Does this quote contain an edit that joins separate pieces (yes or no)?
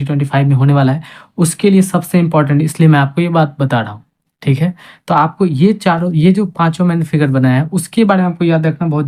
no